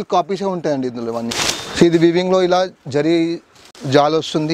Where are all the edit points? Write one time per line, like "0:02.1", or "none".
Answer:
0:01.3